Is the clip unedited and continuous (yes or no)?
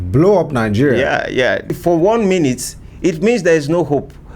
no